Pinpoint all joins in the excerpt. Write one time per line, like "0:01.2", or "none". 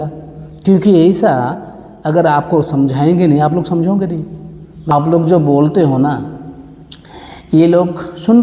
0:04.9